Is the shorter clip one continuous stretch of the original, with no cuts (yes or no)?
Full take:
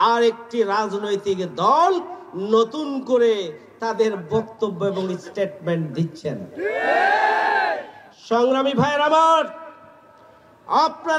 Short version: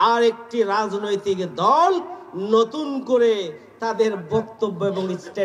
yes